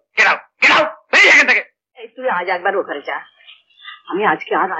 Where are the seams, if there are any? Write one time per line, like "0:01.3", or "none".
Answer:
0:02.1